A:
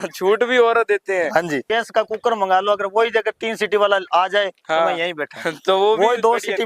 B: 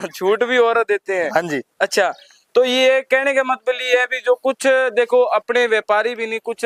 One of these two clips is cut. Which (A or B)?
A